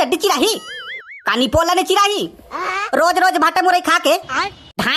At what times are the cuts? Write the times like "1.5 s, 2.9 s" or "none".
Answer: none